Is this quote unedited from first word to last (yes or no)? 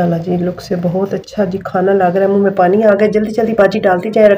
yes